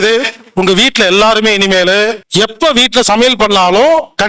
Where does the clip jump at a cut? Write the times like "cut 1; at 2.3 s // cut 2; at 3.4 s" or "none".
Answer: cut 1; at 2.2 s